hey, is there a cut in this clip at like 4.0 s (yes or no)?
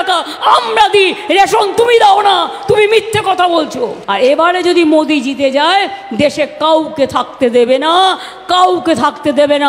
yes